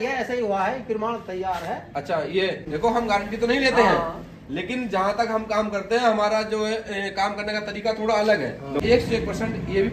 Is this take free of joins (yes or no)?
no